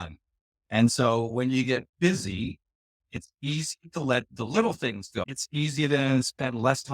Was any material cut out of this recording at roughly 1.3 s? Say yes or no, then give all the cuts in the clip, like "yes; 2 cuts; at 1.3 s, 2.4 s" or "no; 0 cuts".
no; 1 cut; at 5.4 s